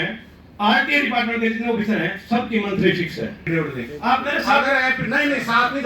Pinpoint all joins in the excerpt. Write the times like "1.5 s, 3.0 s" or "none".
3.4 s